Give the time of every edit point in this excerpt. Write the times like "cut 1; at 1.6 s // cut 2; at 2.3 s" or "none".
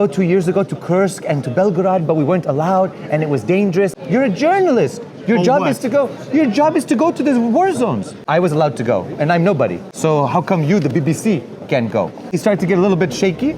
cut 1; at 3.9 s // cut 2; at 8.1 s // cut 3; at 9.9 s // cut 4; at 12.3 s